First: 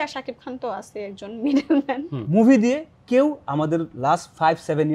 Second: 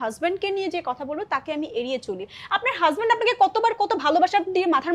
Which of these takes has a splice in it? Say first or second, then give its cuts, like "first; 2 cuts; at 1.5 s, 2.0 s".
first; 1 cut; at 2.2 s